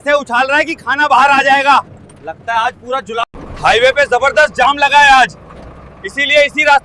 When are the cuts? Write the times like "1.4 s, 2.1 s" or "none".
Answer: none